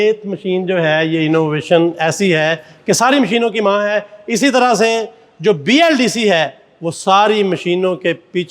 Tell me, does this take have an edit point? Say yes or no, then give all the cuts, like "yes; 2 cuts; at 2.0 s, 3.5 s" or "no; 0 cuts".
no; 0 cuts